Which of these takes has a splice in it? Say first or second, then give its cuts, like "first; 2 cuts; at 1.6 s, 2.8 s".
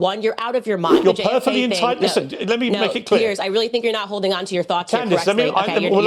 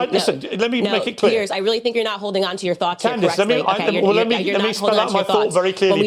first; 1 cut; at 1.0 s